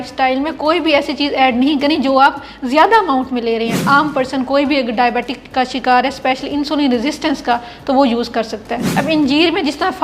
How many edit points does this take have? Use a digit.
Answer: 2